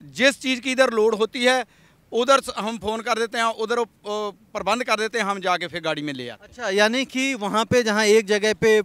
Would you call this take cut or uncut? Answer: uncut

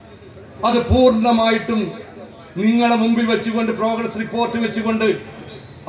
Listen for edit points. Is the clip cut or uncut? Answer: uncut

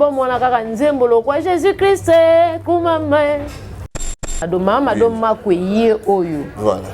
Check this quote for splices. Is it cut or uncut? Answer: cut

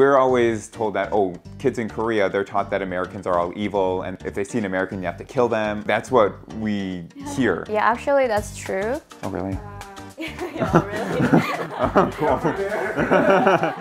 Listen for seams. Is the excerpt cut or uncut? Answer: cut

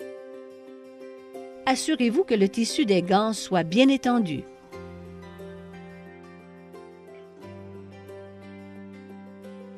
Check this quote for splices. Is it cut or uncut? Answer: uncut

